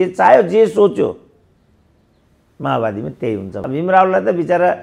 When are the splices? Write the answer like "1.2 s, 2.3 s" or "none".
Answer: 3.5 s